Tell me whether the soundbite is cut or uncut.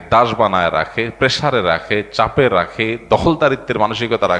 uncut